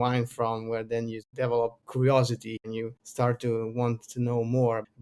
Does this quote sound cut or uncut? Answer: cut